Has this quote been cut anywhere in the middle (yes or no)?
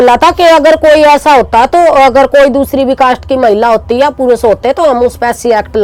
no